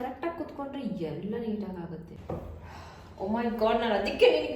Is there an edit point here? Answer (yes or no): yes